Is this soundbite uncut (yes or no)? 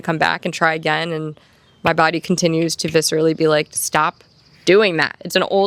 yes